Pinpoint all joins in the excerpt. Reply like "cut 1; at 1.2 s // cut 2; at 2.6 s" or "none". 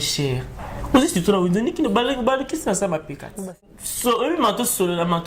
cut 1; at 3.3 s